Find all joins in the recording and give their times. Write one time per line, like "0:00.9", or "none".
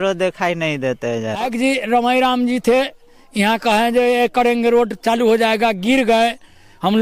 0:01.5